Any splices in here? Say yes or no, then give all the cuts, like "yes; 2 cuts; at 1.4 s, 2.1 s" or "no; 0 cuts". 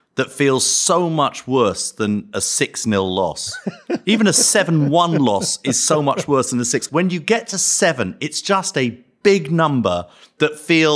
yes; 1 cut; at 6.8 s